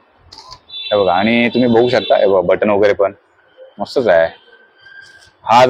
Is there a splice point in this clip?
no; 0 cuts

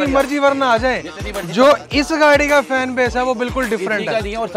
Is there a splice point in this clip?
no; 0 cuts

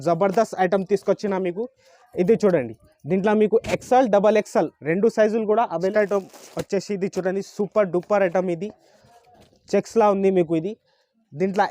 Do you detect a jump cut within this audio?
yes; 1 cut; at 5.9 s

